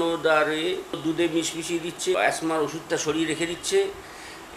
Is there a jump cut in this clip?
yes; 2 cuts; at 1.0 s, 2.2 s

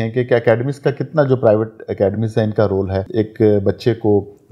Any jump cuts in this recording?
yes; 1 cut; at 3.0 s

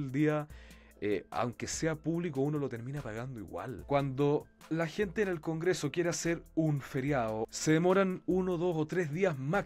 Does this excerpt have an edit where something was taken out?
yes; 2 cuts; at 3.8 s, 7.5 s

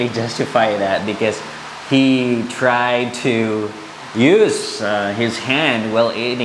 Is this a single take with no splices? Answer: yes; 0 cuts

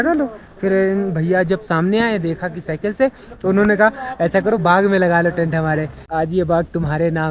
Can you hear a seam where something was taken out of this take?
yes; 1 cut; at 6.0 s

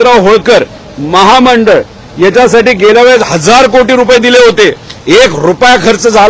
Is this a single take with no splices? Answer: yes; 0 cuts

